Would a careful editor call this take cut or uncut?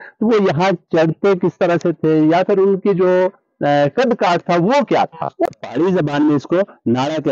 cut